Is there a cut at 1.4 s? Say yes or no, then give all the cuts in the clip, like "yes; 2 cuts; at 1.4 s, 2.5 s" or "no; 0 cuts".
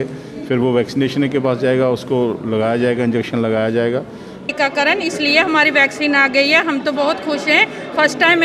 no; 1 cut; at 4.4 s